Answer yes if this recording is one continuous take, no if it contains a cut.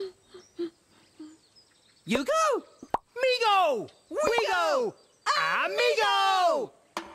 yes